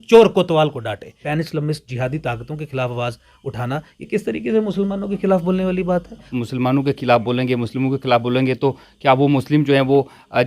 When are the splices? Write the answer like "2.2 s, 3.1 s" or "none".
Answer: 1.1 s, 6.3 s